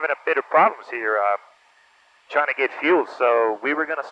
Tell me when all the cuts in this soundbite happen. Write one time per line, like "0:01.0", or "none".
none